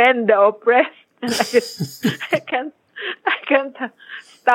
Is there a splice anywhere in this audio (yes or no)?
no